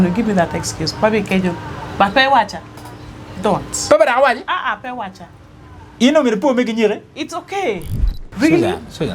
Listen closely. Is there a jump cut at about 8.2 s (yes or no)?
yes